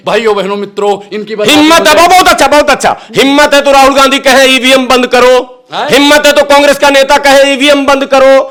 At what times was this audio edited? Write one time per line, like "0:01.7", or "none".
none